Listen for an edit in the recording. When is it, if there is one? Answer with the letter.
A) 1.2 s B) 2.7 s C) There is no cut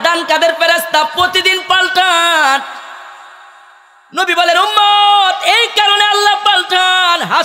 C